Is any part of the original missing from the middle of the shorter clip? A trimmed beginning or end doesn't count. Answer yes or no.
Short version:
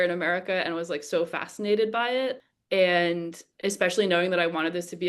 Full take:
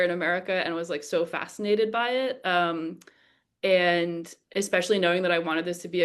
yes